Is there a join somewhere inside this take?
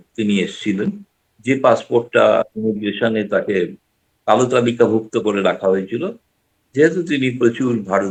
no; 0 cuts

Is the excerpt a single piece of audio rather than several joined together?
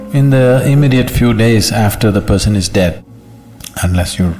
no; 1 cut; at 3.0 s

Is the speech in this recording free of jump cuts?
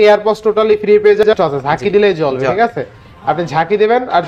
no; 1 cut; at 1.3 s

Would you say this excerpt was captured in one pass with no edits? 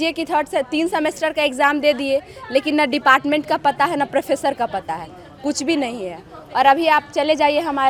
yes; 0 cuts

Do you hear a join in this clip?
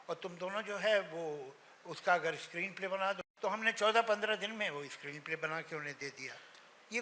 yes; 1 cut; at 3.3 s

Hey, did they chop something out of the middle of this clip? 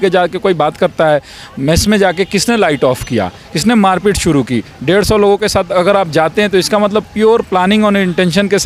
no; 0 cuts

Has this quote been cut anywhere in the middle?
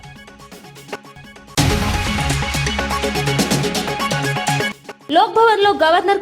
yes; 1 cut; at 1.1 s

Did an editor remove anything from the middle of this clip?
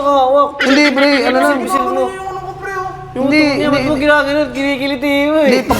no; 0 cuts

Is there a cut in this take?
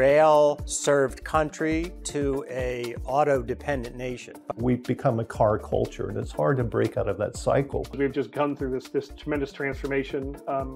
yes; 2 cuts; at 4.3 s, 8.0 s

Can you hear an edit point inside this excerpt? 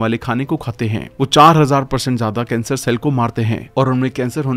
no; 0 cuts

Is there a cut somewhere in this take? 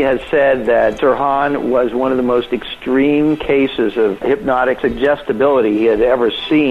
yes; 2 cuts; at 1.0 s, 4.7 s

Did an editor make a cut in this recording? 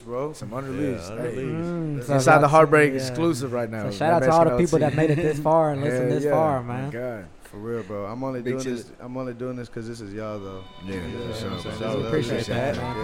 no; 0 cuts

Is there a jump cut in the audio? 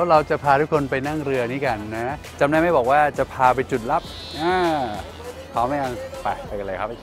yes; 1 cut; at 2.3 s

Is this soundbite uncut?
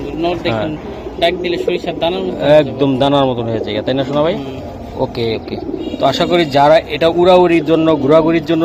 yes; 0 cuts

